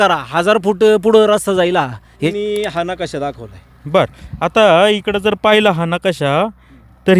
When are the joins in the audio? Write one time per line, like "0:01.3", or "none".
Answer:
0:02.3

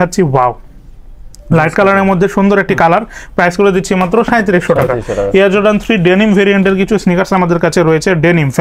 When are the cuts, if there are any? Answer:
none

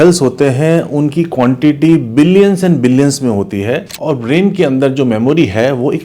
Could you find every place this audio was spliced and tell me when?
0:03.9

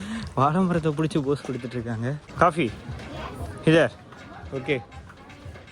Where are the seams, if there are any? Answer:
0:02.2

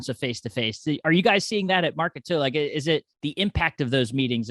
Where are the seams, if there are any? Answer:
0:03.1

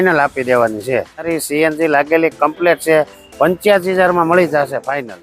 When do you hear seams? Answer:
0:01.4

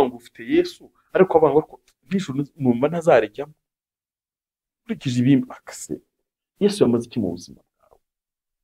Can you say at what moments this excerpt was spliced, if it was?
none

